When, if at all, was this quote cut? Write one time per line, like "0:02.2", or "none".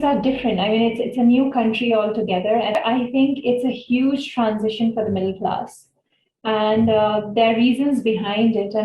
0:02.8